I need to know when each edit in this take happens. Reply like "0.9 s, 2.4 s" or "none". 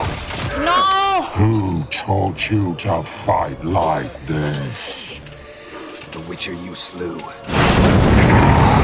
none